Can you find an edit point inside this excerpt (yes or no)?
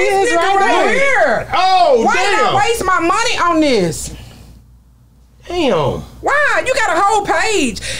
no